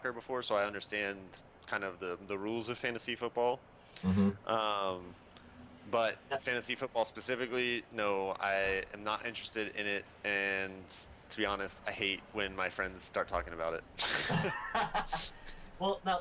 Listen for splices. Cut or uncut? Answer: uncut